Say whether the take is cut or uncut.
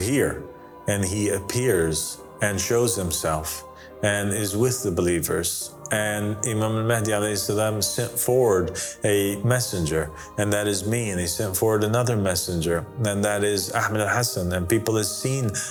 uncut